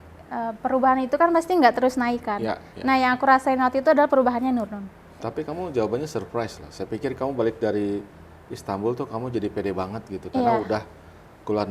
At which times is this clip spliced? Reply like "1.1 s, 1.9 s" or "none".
5.2 s